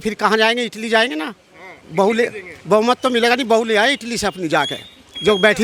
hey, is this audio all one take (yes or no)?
yes